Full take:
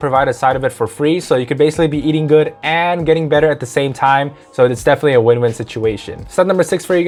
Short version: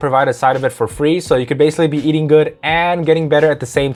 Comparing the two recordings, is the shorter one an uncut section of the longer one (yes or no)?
yes